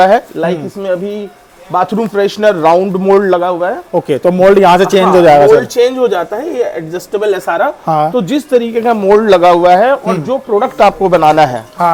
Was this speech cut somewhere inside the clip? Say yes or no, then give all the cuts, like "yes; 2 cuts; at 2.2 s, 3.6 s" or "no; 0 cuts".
no; 0 cuts